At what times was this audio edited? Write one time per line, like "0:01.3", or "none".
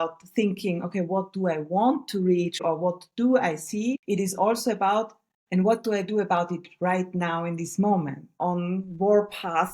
0:02.6
0:08.3